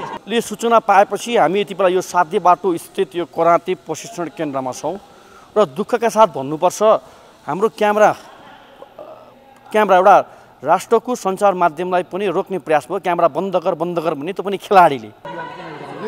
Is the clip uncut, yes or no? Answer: no